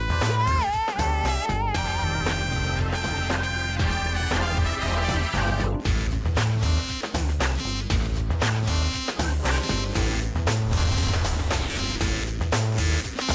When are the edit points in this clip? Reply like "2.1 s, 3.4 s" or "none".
1.8 s